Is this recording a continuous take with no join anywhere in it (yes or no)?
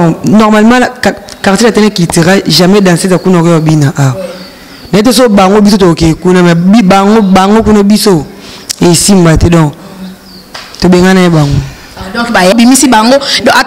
no